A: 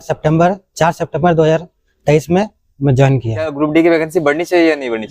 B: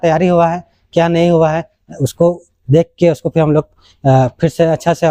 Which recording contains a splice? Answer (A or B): A